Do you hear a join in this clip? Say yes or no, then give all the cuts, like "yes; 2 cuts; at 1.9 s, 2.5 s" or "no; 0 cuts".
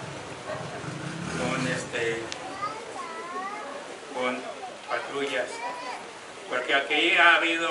yes; 1 cut; at 2.9 s